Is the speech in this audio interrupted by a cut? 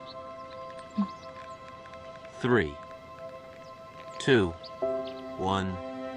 no; 0 cuts

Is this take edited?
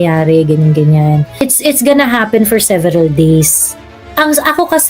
yes; 1 cut; at 1.3 s

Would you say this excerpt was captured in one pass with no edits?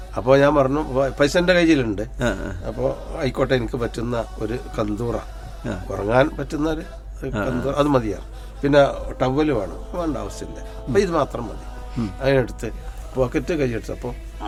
yes; 0 cuts

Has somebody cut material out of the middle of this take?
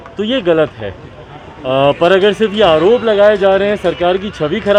no; 0 cuts

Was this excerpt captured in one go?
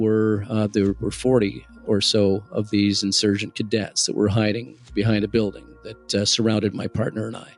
yes; 0 cuts

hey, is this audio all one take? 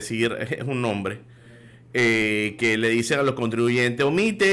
yes; 0 cuts

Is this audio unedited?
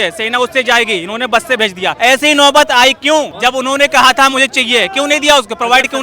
no; 2 cuts; at 2.0 s, 3.3 s

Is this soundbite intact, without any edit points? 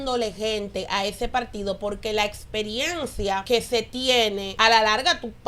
no; 2 cuts; at 3.4 s, 4.5 s

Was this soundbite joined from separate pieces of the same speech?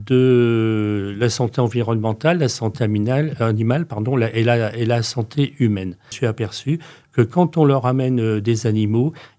yes; 1 cut; at 6.1 s

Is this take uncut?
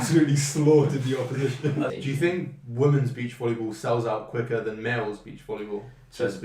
no; 1 cut; at 1.9 s

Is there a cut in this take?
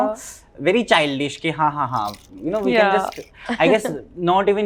no; 0 cuts

